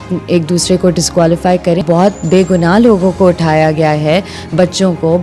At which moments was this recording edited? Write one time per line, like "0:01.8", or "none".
0:01.8